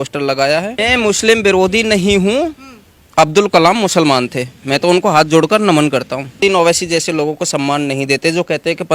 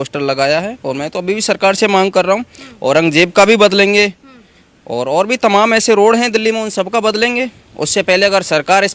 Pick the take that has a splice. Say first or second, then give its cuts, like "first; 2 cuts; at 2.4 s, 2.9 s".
first; 2 cuts; at 0.8 s, 6.4 s